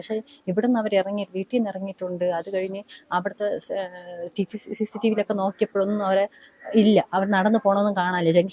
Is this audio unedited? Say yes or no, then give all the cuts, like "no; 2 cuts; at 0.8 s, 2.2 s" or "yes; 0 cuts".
yes; 0 cuts